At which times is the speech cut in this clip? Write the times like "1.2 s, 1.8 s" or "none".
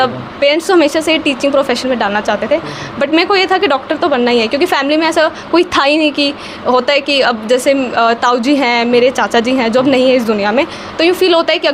none

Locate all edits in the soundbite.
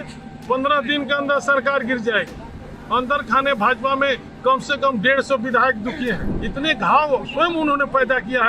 6.3 s

